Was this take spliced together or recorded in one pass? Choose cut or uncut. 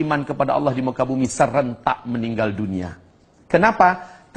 uncut